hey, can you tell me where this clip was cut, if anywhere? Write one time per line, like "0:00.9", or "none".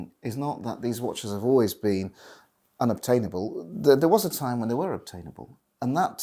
none